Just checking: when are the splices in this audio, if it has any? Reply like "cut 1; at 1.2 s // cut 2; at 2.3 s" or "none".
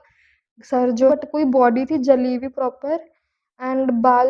cut 1; at 1.1 s